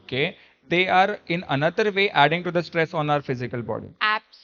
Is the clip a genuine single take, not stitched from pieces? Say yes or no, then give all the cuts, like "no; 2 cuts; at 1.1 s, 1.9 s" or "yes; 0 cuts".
yes; 0 cuts